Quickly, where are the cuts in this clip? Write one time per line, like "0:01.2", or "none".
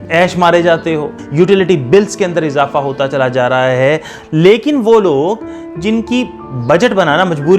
0:01.2
0:04.2

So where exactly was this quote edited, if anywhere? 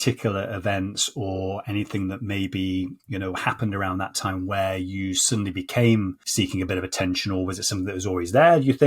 0:06.2

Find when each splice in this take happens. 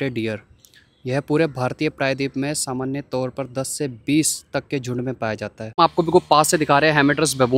0:05.8

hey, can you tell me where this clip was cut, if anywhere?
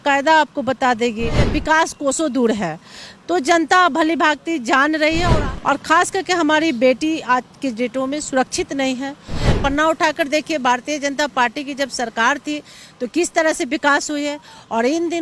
0:01.5
0:05.4
0:09.5

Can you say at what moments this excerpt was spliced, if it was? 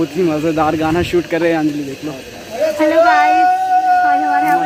none

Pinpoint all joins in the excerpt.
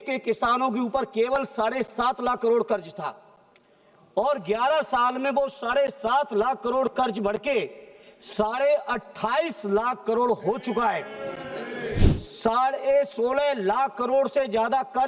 0:12.1

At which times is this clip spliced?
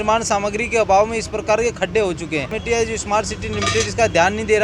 0:02.6

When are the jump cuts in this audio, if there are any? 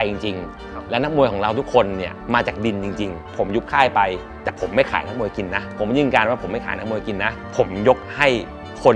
0:02.2
0:03.3
0:05.7
0:07.4

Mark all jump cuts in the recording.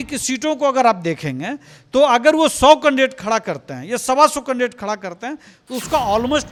none

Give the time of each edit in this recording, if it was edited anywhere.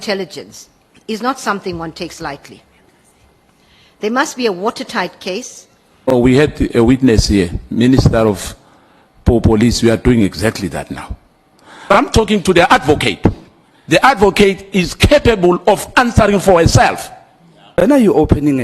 0:06.1
0:11.9
0:17.8

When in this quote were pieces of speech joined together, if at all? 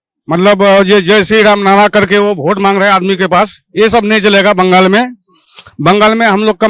none

